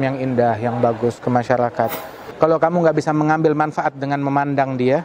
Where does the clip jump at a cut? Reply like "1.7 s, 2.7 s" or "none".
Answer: 2.2 s